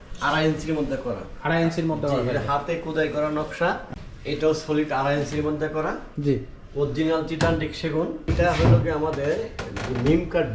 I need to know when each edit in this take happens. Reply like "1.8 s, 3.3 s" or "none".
4.0 s, 8.3 s